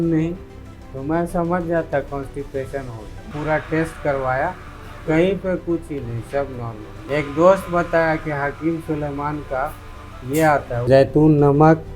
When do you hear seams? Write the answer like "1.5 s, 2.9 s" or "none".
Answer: 3.3 s, 7.0 s, 10.9 s